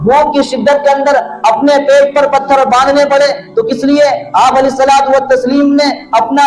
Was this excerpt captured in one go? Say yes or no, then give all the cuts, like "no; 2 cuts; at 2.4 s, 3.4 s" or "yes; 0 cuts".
yes; 0 cuts